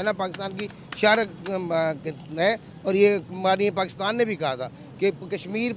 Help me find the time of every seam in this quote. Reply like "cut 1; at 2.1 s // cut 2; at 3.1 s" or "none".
none